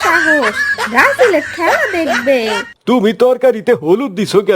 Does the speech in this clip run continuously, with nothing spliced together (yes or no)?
no